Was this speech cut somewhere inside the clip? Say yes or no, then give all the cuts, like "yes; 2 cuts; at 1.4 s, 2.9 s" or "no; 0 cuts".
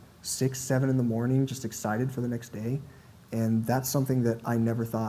no; 0 cuts